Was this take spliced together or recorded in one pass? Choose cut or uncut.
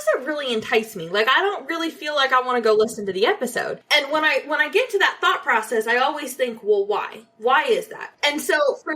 cut